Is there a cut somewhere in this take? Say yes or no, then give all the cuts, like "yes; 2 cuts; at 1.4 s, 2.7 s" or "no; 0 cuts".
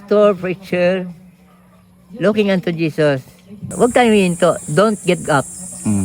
yes; 1 cut; at 3.6 s